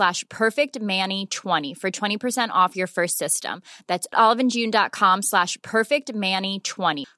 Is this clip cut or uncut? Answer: cut